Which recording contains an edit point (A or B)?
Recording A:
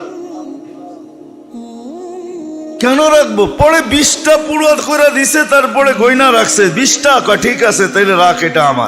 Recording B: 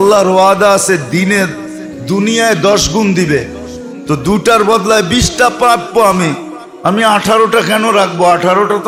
A